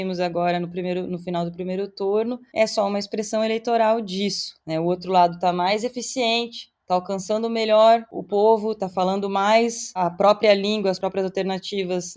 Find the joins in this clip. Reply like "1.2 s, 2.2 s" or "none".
8.2 s, 11.0 s